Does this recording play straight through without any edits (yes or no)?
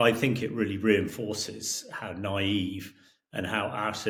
yes